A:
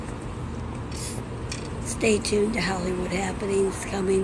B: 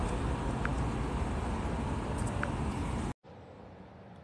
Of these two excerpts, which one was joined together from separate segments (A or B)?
B